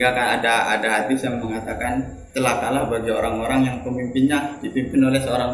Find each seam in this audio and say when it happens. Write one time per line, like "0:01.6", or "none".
0:02.2